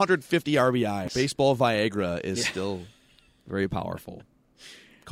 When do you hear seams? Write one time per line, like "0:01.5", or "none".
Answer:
0:01.0